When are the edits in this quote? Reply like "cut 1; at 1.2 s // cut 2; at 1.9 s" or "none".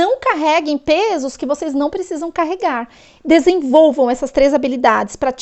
none